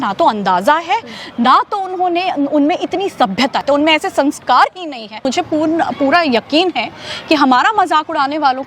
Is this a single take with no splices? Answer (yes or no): no